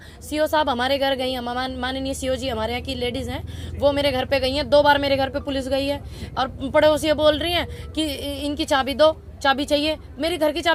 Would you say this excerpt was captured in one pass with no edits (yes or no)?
yes